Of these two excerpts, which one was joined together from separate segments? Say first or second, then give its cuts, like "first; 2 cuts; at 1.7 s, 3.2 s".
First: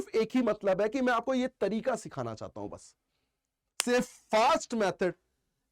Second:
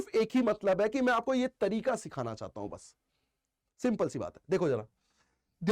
first; 1 cut; at 3.7 s